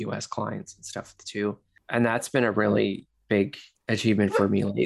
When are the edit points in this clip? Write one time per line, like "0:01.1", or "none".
0:01.7